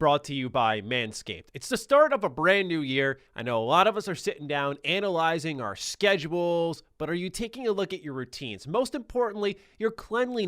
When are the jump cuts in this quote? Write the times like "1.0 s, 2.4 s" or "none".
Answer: 3.3 s